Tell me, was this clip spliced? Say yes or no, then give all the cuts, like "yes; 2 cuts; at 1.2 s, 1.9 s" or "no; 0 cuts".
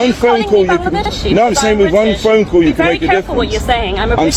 no; 0 cuts